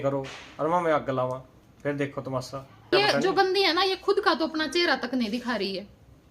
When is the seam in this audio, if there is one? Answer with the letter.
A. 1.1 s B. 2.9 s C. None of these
B